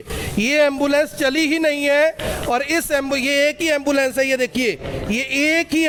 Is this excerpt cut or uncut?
uncut